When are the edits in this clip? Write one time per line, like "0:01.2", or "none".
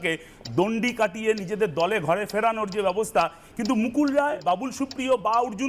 0:03.4
0:04.4